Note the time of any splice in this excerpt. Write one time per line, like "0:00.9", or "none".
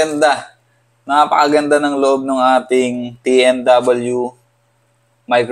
none